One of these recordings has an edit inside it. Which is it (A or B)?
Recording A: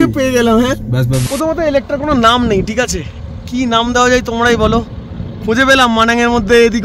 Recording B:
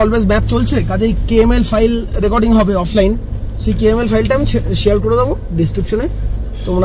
A